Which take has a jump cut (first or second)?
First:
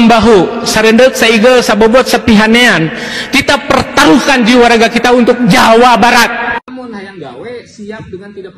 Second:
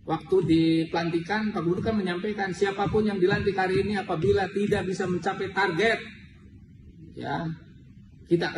first